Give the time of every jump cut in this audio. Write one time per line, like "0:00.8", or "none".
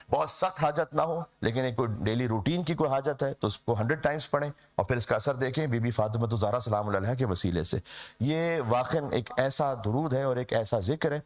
none